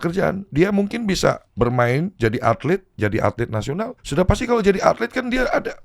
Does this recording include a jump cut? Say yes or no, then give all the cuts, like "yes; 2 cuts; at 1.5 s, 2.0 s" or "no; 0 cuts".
yes; 3 cuts; at 1.5 s, 2.9 s, 4.0 s